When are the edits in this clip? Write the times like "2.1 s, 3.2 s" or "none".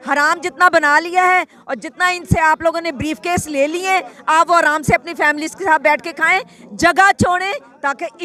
none